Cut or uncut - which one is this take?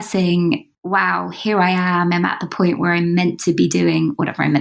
uncut